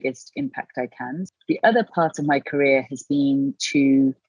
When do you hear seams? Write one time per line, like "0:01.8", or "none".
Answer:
0:01.3

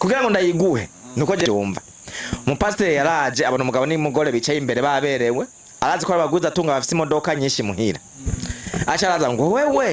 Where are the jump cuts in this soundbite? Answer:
0:01.5

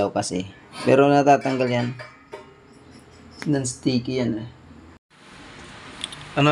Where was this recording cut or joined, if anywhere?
0:05.0

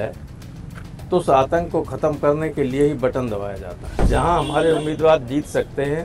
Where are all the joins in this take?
0:03.8

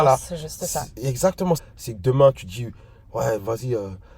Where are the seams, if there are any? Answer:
0:01.6

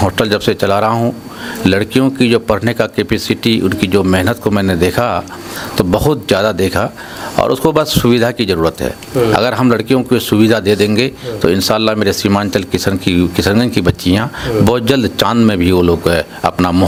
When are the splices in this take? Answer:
none

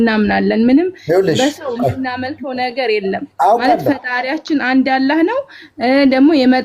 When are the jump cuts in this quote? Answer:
none

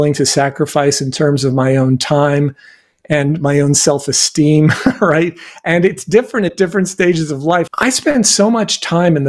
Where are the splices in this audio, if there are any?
0:07.7

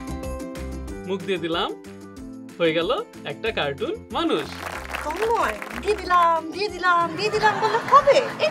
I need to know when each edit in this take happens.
none

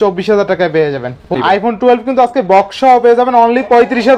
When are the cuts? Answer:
0:01.2

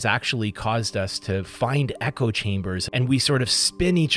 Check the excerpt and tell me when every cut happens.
0:02.8

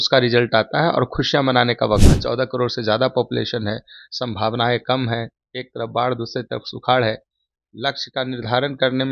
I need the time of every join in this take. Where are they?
0:02.1

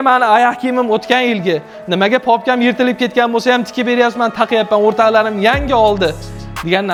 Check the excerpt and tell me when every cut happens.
none

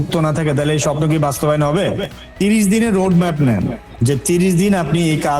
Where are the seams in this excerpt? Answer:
none

